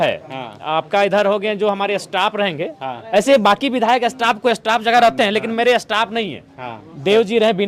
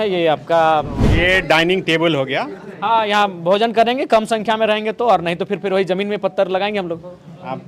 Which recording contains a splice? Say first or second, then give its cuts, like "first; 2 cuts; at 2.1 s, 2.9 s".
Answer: second; 1 cut; at 1.0 s